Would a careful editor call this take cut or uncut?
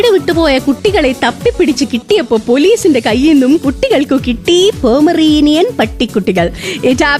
uncut